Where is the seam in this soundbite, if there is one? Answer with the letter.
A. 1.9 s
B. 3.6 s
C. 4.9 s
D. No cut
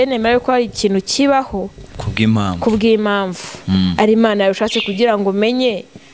D